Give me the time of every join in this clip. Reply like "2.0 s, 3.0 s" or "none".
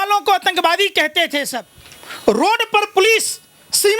none